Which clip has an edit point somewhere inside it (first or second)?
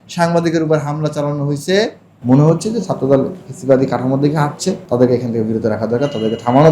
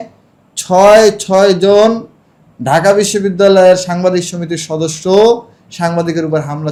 first